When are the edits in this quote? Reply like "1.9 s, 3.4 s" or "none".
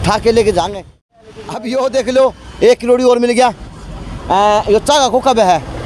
0.9 s